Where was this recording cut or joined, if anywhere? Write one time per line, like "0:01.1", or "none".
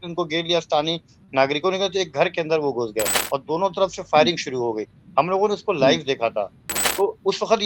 0:03.2
0:06.8